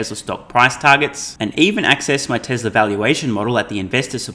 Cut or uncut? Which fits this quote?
uncut